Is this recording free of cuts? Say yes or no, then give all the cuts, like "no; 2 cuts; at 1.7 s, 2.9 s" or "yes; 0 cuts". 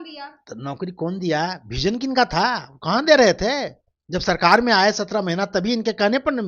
yes; 0 cuts